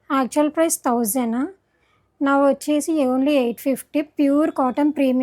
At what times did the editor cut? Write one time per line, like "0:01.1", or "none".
none